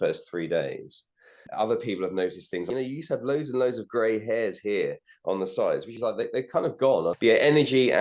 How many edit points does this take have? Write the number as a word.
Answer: four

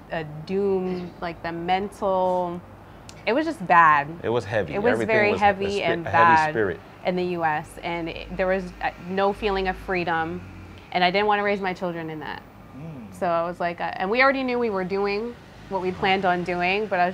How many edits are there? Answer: zero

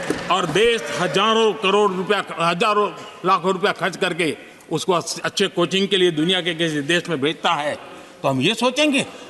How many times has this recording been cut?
zero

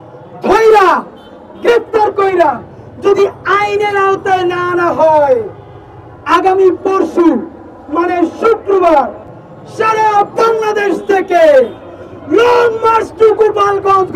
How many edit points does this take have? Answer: zero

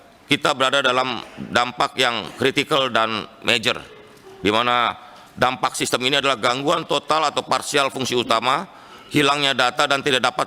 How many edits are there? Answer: zero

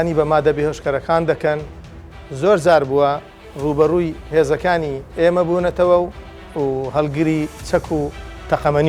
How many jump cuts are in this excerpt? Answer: two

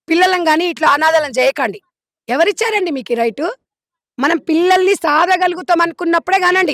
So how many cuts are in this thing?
zero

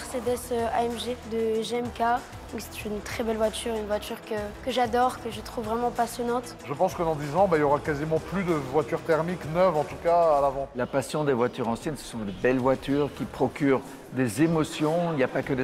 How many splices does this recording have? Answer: four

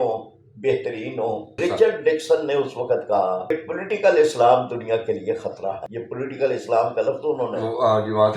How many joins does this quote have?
three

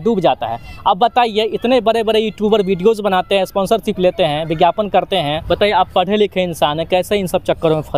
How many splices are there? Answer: one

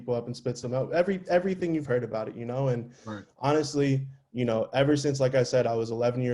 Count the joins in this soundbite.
zero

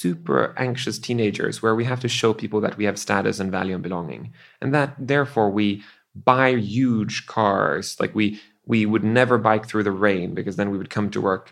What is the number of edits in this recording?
zero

